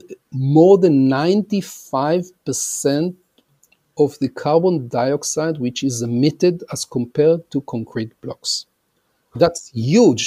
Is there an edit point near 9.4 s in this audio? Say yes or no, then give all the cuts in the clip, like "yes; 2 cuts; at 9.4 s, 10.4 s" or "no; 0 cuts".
yes; 1 cut; at 9.4 s